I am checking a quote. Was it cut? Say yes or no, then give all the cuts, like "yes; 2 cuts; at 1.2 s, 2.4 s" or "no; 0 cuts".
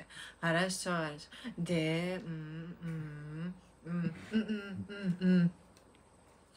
no; 0 cuts